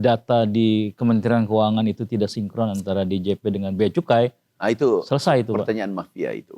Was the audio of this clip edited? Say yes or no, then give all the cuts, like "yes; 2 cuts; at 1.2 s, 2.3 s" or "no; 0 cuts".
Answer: no; 0 cuts